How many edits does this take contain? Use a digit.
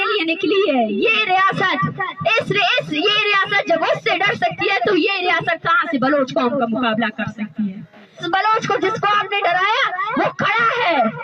1